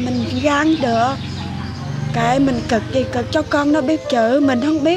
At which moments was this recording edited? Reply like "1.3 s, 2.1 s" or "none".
none